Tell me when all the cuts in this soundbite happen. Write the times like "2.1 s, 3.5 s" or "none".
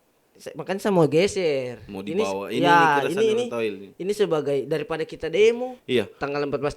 5.8 s